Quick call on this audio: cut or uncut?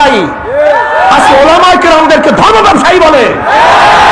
uncut